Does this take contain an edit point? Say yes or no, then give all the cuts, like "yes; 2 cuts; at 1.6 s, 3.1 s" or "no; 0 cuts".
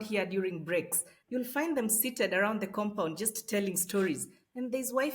yes; 1 cut; at 1.1 s